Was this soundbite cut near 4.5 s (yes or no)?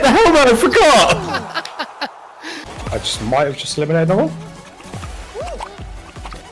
no